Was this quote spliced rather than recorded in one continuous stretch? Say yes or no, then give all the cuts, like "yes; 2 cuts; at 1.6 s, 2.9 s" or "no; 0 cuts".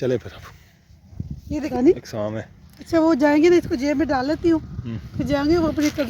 yes; 1 cut; at 1.5 s